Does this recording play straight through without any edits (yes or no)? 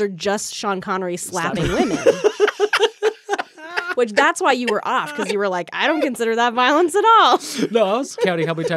yes